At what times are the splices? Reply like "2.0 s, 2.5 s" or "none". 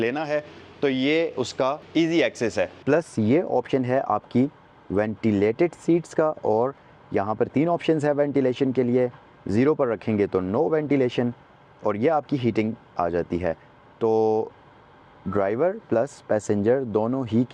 1.8 s, 2.8 s